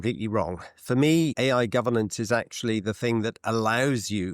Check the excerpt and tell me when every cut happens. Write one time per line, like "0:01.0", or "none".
none